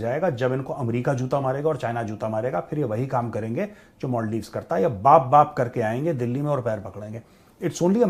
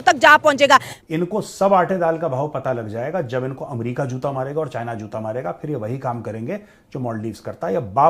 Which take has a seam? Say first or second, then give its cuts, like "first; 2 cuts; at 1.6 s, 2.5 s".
second; 1 cut; at 1.0 s